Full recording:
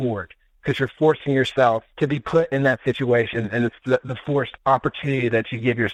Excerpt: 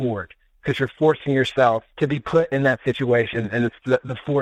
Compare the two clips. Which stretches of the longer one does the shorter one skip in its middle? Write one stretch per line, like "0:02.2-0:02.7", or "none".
none